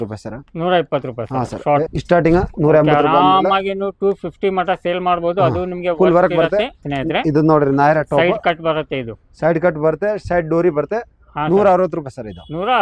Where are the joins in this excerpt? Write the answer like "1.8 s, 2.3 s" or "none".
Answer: 1.9 s, 6.9 s